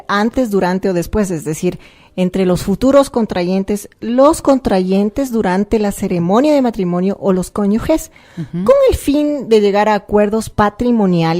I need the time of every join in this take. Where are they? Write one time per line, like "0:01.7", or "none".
0:02.5